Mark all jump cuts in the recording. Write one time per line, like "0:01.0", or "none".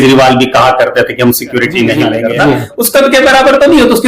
0:02.0